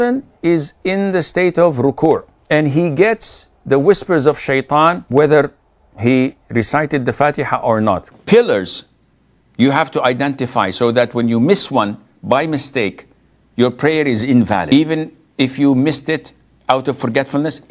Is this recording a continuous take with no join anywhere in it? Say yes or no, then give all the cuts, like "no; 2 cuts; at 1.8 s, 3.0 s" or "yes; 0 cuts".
no; 4 cuts; at 2.3 s, 5.0 s, 8.1 s, 14.7 s